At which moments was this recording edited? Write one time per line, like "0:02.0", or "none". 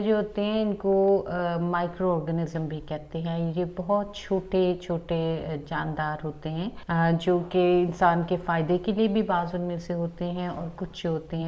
0:06.8